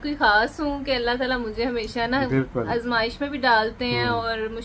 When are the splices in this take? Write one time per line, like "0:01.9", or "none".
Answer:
none